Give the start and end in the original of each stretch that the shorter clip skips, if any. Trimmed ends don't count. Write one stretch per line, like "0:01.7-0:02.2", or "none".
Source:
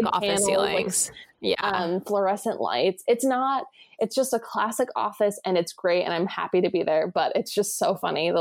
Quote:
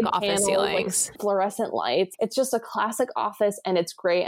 0:01.1-0:02.0
0:03.0-0:03.9